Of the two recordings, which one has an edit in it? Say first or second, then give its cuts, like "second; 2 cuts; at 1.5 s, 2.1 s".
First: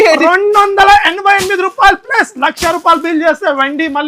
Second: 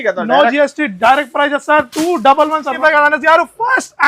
second; 1 cut; at 2.7 s